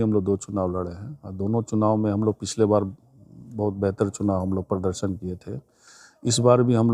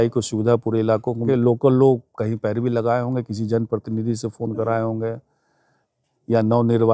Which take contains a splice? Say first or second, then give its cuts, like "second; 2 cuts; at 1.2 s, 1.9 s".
second; 1 cut; at 1.2 s